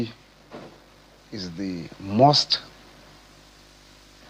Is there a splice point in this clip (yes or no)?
no